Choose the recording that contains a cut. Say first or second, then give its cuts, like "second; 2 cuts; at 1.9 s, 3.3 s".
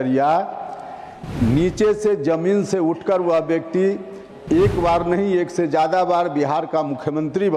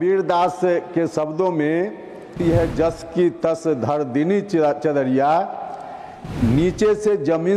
second; 1 cut; at 2.3 s